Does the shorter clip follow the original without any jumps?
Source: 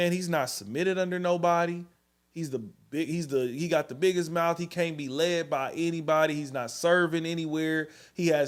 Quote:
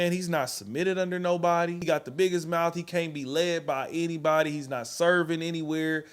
no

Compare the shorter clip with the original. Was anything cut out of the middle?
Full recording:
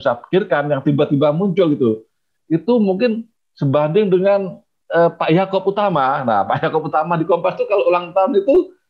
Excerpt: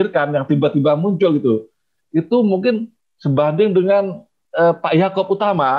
no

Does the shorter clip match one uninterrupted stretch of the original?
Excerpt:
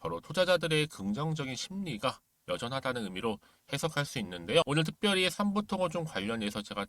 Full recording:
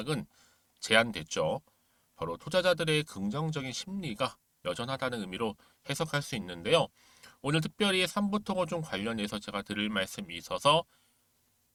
no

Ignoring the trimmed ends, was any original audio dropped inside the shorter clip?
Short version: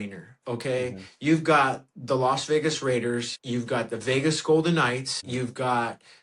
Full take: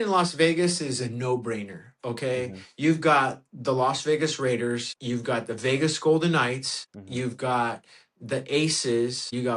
yes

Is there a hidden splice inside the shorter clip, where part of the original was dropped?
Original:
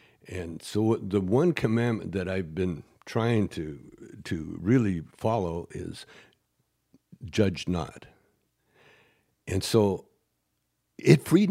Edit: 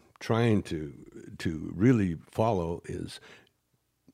no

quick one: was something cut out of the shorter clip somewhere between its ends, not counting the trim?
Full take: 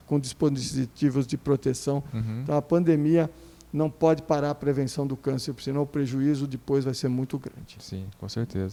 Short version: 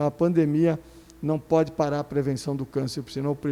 no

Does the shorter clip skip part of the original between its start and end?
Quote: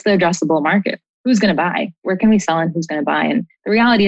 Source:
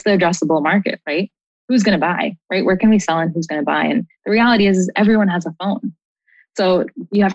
yes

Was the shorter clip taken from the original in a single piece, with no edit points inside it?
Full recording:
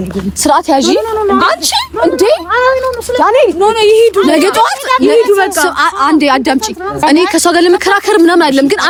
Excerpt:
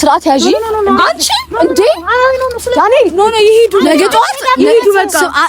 yes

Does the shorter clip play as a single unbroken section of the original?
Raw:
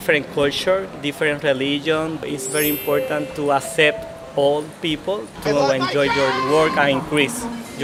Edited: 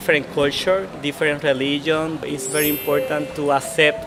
yes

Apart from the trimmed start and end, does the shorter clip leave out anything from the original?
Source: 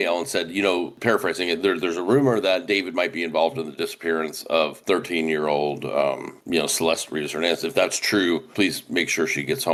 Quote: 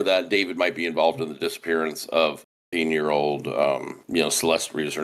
no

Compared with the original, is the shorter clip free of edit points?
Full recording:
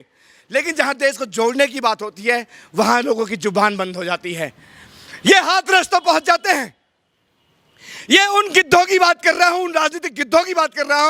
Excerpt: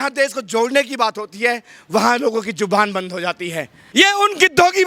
no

